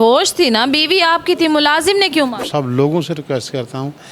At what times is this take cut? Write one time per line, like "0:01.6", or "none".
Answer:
0:02.4